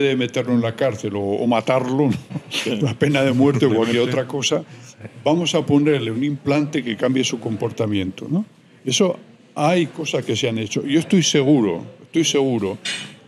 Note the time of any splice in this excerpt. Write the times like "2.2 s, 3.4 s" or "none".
none